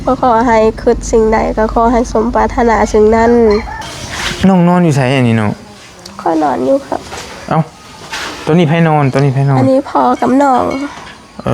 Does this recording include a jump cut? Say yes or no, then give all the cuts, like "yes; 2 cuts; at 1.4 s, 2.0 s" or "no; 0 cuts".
yes; 1 cut; at 3.7 s